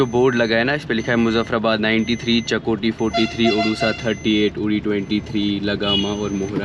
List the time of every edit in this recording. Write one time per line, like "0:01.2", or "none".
none